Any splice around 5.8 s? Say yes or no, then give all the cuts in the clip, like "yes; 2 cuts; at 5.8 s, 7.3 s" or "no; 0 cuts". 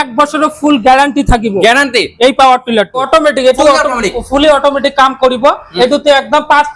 no; 1 cut; at 3.0 s